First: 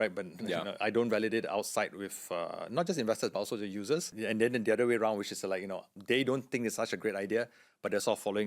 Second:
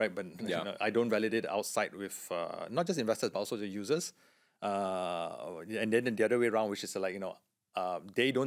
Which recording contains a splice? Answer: first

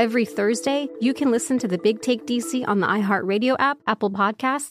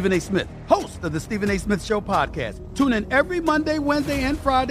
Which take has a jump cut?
first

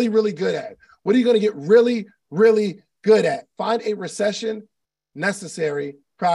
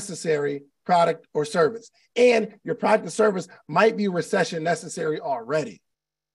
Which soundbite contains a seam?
first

